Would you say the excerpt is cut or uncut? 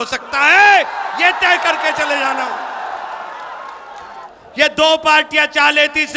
cut